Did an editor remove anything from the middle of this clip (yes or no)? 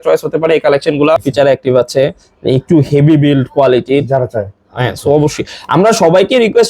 yes